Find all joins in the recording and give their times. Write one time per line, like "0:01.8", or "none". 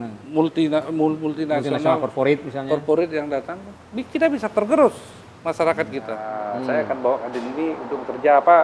0:06.3